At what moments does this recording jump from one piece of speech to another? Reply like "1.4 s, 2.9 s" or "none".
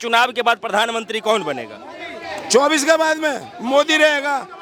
none